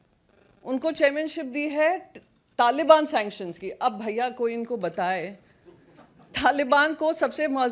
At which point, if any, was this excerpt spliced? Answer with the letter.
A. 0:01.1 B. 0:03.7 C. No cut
C